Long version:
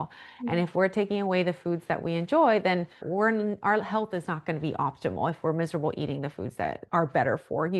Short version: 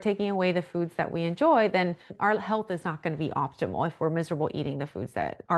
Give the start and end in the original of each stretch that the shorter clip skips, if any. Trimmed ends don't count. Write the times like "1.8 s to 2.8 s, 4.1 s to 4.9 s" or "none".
3.0 s to 3.6 s